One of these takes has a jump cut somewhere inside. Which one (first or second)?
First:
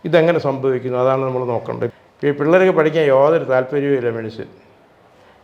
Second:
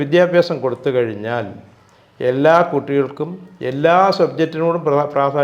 first